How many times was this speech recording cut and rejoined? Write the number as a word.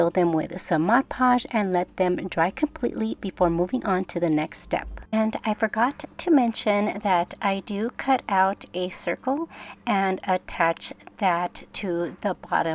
one